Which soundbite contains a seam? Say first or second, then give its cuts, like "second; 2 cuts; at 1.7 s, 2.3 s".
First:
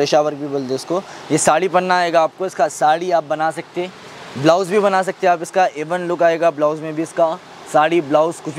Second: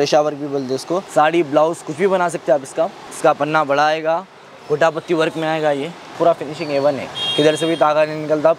second; 3 cuts; at 1.1 s, 3.0 s, 6.1 s